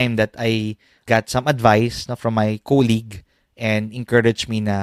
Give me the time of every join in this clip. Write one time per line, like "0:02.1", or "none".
0:01.0

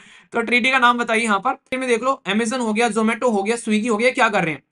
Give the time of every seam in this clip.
0:01.7

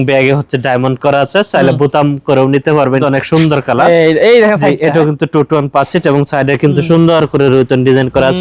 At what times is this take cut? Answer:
0:03.0

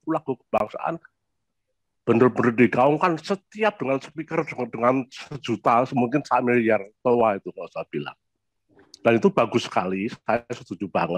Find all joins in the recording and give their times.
none

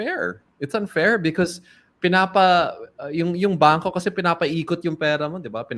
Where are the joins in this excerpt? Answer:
none

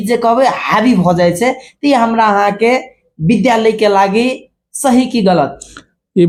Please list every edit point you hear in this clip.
none

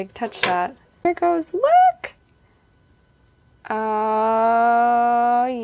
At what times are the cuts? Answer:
0:01.1

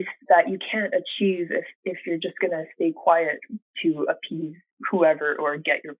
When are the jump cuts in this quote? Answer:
none

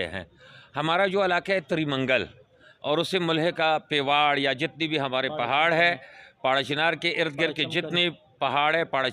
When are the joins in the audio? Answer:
none

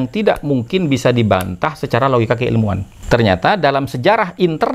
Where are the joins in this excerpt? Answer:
0:02.9

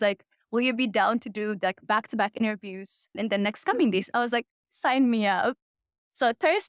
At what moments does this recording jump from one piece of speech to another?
0:03.1

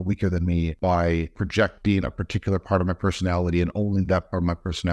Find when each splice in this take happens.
0:01.2

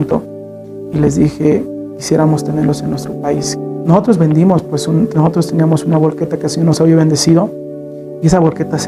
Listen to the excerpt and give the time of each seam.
0:03.7

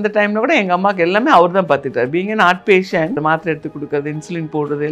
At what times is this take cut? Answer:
0:03.2

